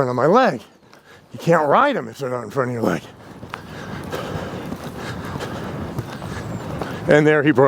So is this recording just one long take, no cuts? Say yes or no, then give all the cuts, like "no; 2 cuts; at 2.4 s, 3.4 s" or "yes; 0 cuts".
yes; 0 cuts